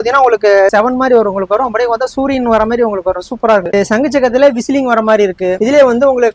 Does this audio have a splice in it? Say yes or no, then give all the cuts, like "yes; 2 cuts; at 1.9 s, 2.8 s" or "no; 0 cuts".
yes; 1 cut; at 3.7 s